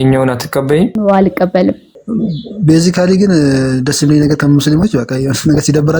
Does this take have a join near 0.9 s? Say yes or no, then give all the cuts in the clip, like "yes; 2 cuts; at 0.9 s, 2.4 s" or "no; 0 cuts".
yes; 2 cuts; at 0.9 s, 1.9 s